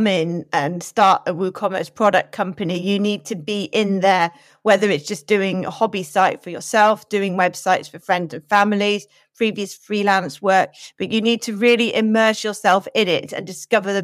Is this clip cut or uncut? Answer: uncut